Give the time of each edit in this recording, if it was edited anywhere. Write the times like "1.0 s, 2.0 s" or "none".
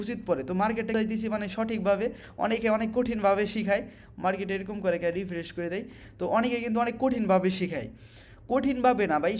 0.9 s